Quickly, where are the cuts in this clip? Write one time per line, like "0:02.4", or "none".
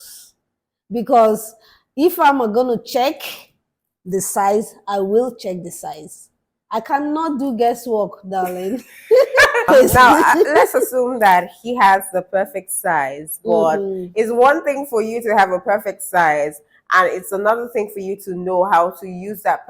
0:09.7